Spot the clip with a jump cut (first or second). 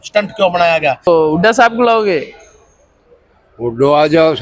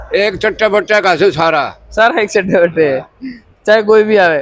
first